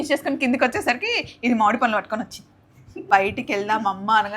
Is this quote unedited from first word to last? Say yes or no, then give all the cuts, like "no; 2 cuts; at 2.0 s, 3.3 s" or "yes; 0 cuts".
no; 1 cut; at 3.1 s